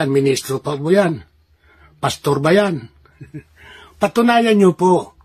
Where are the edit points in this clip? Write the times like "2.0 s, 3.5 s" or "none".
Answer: 1.3 s